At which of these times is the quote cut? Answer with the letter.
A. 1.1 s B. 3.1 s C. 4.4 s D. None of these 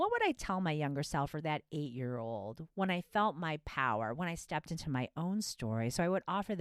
D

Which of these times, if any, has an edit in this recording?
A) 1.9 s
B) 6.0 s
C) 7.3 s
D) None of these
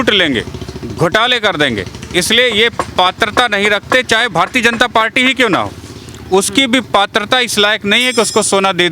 D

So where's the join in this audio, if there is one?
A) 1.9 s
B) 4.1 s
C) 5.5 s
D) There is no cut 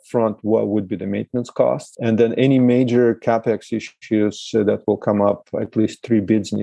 A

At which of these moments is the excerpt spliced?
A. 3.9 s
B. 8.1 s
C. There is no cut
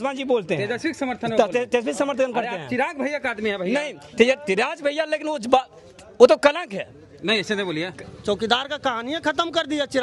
B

